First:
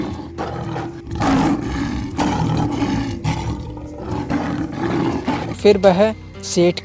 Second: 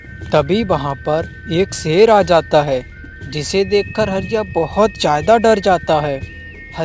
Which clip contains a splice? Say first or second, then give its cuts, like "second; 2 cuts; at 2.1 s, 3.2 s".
first; 1 cut; at 5.6 s